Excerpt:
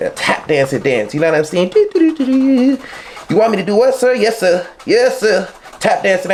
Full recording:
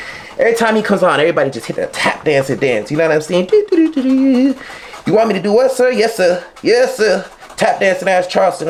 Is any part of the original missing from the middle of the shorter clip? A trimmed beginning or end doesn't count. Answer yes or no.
no